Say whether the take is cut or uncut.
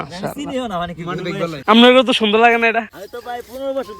cut